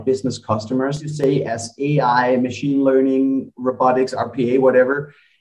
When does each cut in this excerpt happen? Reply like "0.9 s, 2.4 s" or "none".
1.1 s